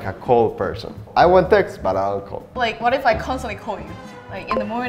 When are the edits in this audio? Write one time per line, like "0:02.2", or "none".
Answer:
0:01.0
0:02.4